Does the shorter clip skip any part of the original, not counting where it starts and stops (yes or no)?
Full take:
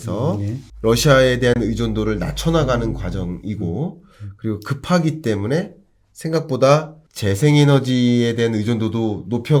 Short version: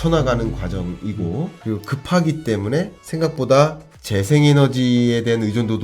yes